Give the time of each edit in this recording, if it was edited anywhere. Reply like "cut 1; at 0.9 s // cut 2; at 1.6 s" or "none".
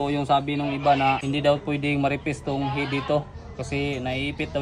cut 1; at 1.2 s